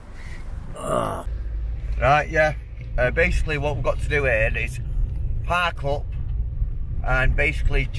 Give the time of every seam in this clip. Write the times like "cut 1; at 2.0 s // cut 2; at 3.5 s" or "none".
cut 1; at 1.4 s